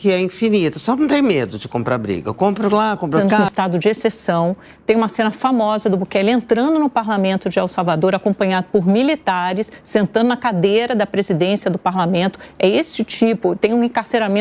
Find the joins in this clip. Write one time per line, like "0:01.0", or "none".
0:03.3